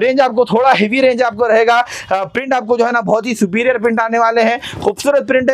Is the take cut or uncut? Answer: uncut